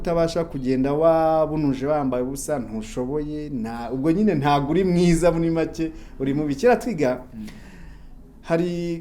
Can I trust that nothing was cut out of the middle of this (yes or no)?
yes